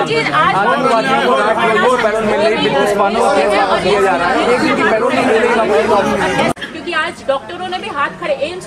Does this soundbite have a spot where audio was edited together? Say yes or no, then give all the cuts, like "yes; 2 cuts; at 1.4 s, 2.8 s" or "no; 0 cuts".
yes; 1 cut; at 6.5 s